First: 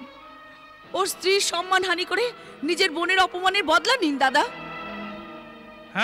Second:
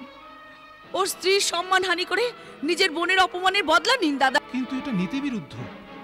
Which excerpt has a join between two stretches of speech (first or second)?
second